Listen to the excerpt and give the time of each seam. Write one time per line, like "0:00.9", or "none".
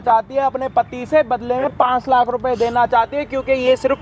none